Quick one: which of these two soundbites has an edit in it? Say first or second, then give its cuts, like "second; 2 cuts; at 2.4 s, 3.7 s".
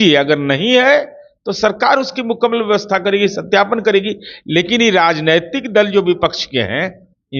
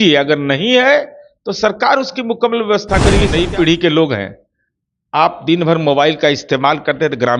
second; 1 cut; at 3.3 s